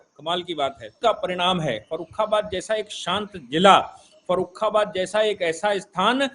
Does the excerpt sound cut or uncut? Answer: cut